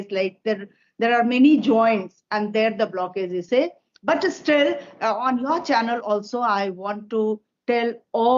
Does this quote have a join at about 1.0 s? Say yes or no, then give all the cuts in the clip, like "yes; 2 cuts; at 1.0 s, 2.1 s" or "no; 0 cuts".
no; 1 cut; at 3.4 s